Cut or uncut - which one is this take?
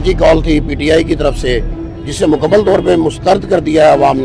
uncut